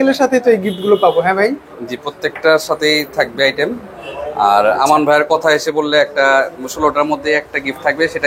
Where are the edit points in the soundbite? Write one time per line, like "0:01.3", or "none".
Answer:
none